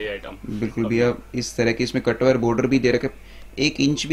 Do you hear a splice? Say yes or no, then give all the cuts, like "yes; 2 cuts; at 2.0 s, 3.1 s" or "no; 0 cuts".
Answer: no; 0 cuts